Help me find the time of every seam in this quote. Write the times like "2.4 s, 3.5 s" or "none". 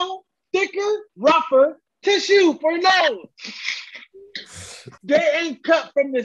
4.9 s